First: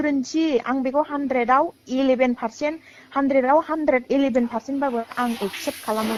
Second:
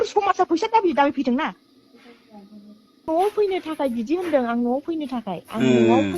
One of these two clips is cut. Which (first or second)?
second